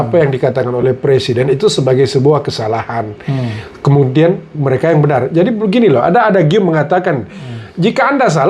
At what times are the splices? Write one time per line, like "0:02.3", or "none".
none